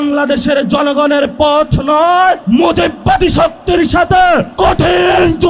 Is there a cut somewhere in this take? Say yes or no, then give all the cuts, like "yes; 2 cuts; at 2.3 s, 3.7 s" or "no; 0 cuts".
yes; 2 cuts; at 2.4 s, 4.5 s